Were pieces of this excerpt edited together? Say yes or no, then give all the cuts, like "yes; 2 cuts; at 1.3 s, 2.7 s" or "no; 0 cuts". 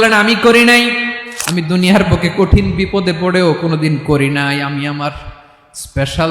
yes; 1 cut; at 1.2 s